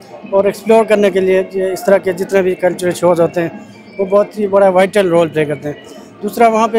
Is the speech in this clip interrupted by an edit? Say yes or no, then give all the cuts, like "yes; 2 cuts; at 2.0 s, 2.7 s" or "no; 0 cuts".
no; 0 cuts